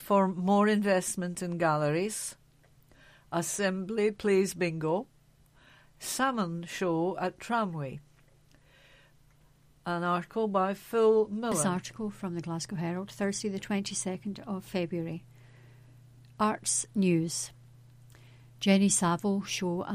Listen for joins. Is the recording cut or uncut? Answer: cut